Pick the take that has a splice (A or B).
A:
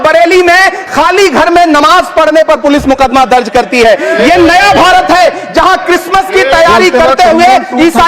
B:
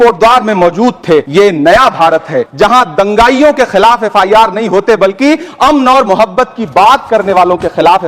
B